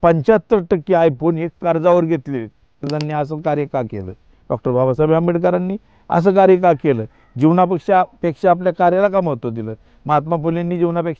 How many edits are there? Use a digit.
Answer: 1